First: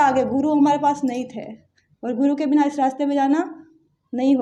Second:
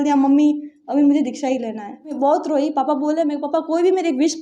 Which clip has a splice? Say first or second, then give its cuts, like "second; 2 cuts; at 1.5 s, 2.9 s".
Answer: second; 1 cut; at 2.1 s